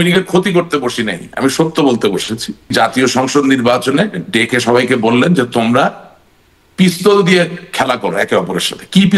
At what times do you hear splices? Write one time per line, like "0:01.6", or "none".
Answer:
0:02.7